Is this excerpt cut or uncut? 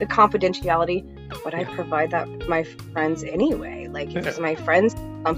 uncut